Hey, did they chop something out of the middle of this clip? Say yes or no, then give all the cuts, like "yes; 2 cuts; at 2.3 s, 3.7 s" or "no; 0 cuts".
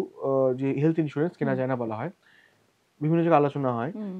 no; 0 cuts